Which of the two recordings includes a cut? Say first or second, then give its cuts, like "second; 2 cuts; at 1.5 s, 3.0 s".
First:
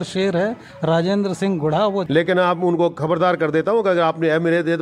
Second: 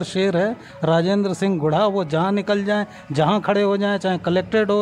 first; 1 cut; at 2.0 s